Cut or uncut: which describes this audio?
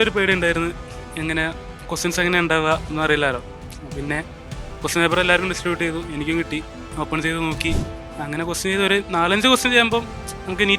cut